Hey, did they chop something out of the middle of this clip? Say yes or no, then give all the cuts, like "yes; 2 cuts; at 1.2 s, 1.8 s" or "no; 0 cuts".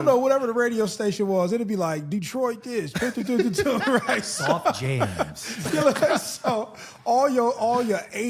no; 0 cuts